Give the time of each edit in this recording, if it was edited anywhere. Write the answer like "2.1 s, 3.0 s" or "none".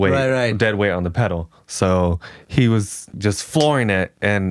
3.0 s